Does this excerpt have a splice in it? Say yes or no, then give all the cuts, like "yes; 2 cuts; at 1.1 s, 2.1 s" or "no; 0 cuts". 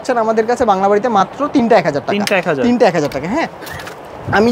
no; 0 cuts